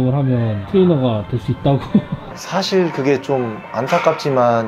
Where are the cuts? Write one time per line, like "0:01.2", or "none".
none